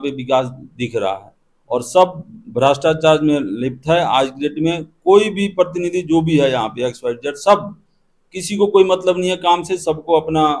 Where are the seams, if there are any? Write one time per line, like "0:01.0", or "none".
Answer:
none